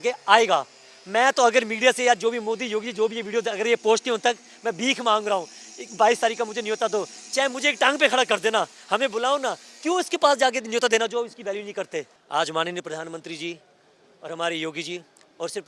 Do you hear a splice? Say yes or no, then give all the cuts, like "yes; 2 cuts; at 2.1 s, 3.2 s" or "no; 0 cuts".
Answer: yes; 1 cut; at 12.2 s